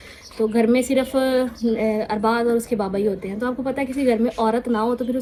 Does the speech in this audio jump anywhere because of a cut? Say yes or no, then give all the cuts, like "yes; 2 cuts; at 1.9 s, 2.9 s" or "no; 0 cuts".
no; 0 cuts